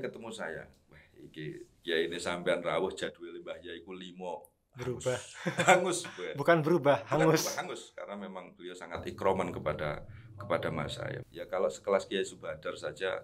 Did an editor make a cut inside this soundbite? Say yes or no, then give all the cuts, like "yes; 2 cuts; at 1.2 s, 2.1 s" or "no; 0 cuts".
yes; 1 cut; at 11.2 s